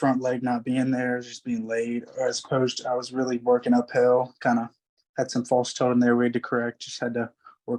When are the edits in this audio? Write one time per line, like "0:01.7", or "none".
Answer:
none